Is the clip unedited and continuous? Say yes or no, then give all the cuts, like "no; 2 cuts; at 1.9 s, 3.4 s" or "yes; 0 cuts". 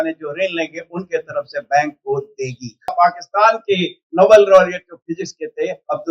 no; 1 cut; at 2.9 s